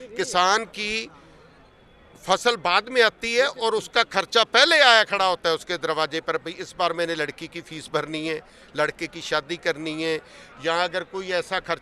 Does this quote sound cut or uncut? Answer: uncut